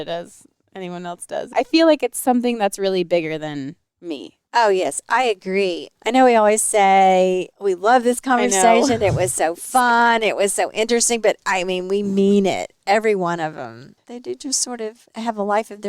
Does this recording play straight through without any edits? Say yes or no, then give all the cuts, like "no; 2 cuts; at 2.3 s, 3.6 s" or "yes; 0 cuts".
no; 2 cuts; at 1.5 s, 5.9 s